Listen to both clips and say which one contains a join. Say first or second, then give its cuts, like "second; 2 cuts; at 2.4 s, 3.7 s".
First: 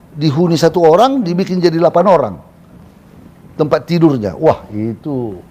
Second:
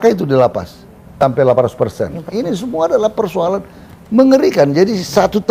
second; 1 cut; at 1.2 s